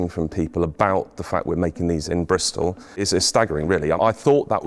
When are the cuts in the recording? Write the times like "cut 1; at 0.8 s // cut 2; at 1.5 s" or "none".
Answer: cut 1; at 3.0 s